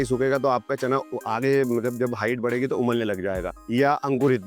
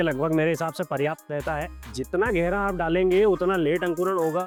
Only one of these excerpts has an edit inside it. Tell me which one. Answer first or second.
first